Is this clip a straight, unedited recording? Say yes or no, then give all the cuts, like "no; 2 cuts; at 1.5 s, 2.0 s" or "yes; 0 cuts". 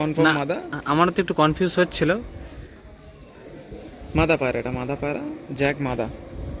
yes; 0 cuts